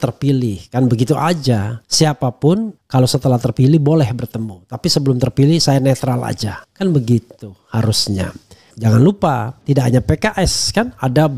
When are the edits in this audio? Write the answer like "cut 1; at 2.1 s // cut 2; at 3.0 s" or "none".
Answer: cut 1; at 8.7 s